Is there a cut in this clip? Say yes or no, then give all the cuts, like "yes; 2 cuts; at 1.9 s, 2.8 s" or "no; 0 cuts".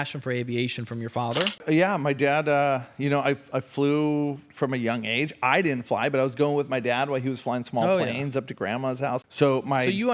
yes; 2 cuts; at 1.6 s, 9.3 s